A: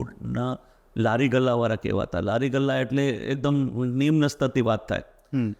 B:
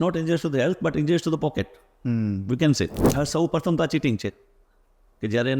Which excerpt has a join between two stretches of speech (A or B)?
B